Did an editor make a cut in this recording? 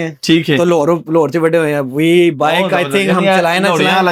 no; 0 cuts

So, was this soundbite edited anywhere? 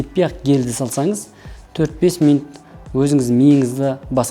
no; 0 cuts

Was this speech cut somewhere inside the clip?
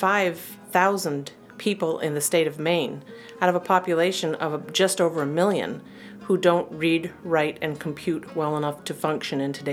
no; 0 cuts

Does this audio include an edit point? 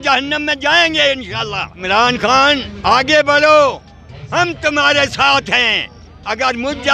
yes; 2 cuts; at 1.7 s, 2.7 s

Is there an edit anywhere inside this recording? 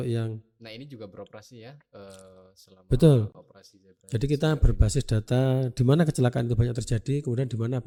no; 0 cuts

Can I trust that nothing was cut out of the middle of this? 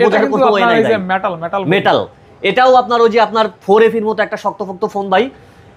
yes; 0 cuts

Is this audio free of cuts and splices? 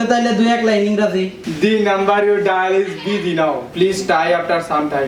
yes; 0 cuts

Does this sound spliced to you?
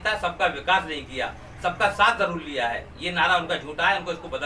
no; 0 cuts

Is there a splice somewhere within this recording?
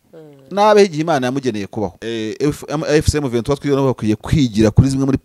yes; 1 cut; at 2.0 s

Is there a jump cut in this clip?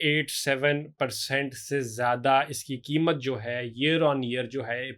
no; 0 cuts

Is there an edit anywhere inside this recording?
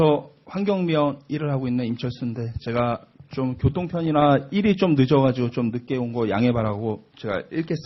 no; 0 cuts

